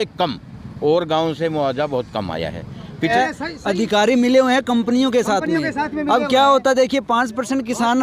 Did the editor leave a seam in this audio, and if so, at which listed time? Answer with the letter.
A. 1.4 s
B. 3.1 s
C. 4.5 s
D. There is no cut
B